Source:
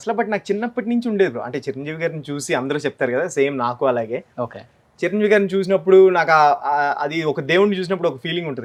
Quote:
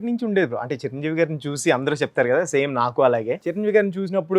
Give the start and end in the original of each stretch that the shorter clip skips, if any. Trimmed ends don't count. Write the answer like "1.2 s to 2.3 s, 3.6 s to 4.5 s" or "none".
4.3 s to 5.0 s